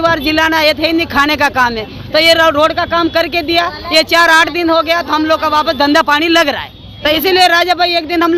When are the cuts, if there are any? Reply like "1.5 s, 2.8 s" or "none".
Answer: none